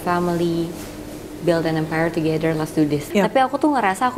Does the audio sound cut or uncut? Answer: cut